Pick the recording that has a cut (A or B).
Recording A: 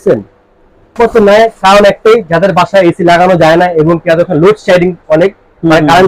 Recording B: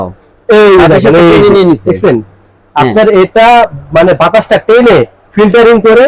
A